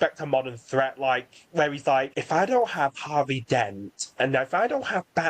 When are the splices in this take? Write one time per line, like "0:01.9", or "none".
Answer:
0:02.2